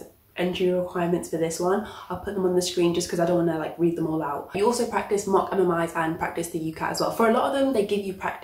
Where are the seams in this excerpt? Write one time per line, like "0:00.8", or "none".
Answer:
0:04.6